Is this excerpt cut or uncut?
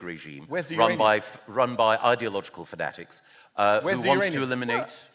uncut